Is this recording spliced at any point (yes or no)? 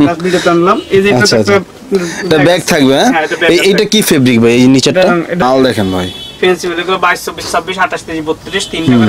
yes